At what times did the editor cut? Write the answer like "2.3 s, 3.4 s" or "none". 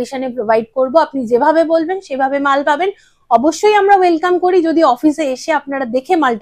none